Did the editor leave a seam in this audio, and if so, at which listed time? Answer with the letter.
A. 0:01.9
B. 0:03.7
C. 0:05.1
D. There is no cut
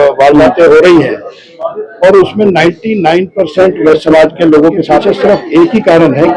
C